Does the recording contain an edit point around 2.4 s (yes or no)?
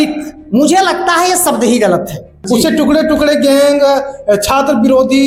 yes